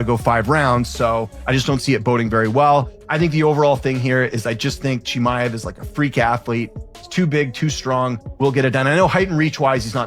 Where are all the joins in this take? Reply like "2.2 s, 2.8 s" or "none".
2.9 s